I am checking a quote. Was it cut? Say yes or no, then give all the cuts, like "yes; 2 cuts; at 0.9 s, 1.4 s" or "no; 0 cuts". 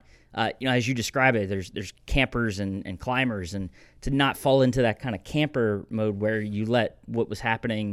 no; 0 cuts